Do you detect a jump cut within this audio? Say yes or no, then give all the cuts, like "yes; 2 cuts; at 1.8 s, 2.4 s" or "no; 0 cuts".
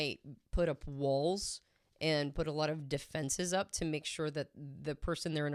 no; 0 cuts